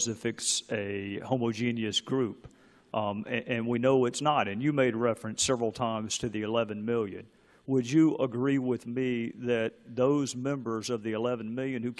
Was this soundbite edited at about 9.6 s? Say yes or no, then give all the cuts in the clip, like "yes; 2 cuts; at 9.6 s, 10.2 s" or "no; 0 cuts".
yes; 1 cut; at 9.6 s